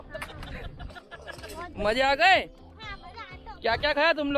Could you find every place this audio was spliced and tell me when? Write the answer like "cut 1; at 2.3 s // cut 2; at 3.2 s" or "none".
none